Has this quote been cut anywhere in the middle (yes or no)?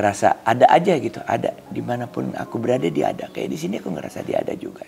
no